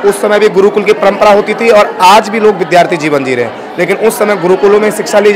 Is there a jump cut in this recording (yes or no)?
no